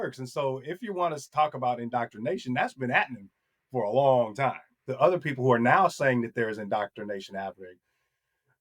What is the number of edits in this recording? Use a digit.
1